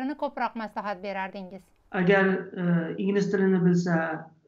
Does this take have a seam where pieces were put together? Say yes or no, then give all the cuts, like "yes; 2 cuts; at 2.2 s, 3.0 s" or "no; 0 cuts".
no; 0 cuts